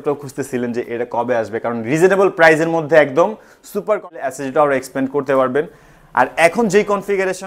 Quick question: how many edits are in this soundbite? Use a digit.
1